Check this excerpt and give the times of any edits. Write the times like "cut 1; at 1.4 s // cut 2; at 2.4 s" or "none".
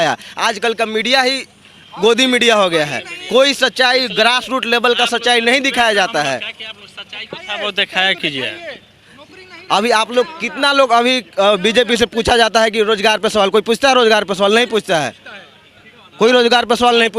none